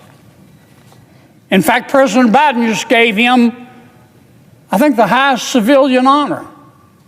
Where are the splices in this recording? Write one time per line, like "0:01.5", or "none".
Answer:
0:01.0